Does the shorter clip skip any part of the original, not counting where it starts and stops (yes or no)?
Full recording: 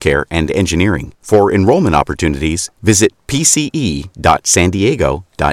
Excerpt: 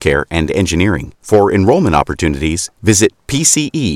no